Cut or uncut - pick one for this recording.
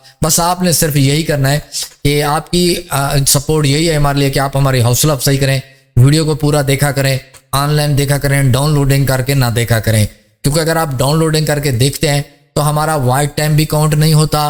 uncut